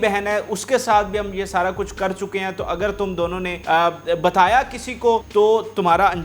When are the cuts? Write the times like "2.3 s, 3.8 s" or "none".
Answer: 3.5 s, 5.3 s